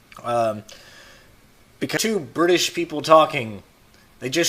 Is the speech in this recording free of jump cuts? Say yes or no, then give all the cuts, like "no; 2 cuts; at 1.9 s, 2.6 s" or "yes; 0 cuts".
yes; 0 cuts